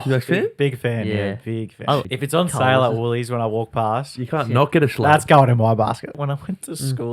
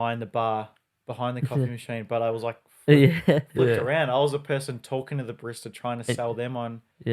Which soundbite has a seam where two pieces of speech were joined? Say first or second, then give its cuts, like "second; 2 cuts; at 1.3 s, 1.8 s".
first; 2 cuts; at 2.0 s, 6.2 s